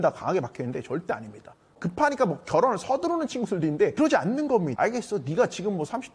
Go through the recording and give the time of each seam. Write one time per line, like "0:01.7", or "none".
0:01.8
0:03.9
0:04.7